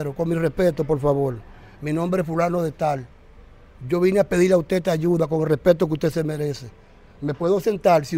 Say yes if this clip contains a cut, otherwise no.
no